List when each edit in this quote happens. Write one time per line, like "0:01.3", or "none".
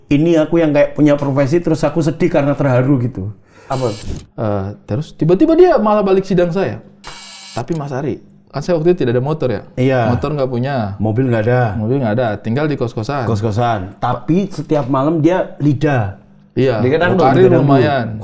0:04.0